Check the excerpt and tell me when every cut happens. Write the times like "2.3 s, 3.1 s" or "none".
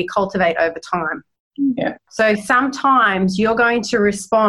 none